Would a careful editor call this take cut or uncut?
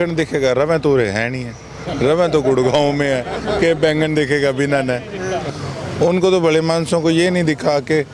cut